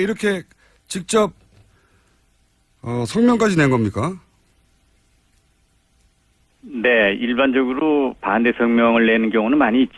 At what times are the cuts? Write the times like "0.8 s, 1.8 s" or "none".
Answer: none

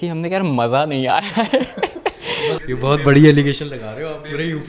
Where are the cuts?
2.6 s

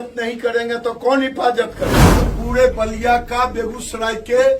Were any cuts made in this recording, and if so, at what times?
2.2 s

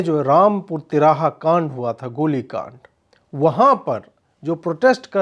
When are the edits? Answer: none

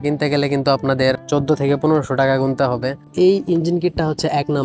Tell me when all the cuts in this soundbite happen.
3.1 s

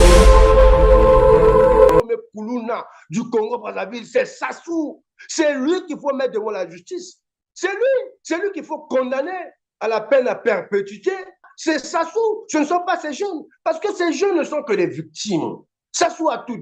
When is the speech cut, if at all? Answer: 2.0 s

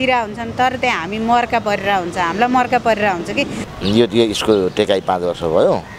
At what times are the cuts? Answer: 3.6 s

